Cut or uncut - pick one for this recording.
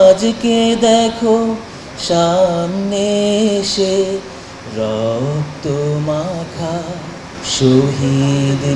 cut